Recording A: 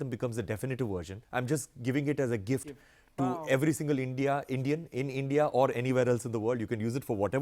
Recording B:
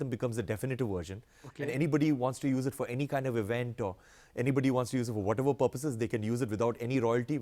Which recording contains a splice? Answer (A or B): A